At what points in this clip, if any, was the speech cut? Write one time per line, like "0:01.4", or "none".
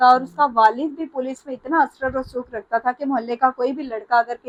none